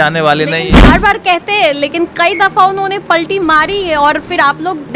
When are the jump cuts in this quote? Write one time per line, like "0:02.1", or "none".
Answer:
none